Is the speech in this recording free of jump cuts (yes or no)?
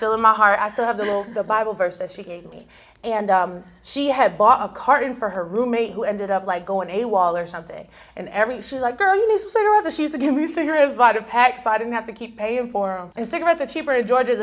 no